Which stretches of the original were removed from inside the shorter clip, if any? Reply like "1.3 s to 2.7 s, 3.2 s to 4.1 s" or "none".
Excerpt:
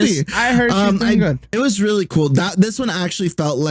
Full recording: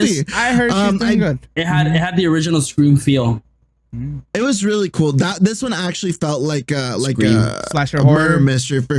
1.4 s to 4.3 s